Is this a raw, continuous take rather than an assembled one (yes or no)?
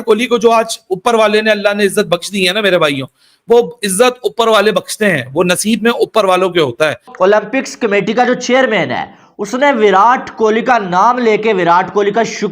no